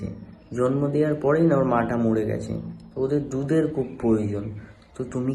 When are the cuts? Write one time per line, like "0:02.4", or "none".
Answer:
none